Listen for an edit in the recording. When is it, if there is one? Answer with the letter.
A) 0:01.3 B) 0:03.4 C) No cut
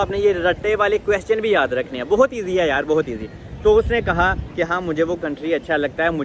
C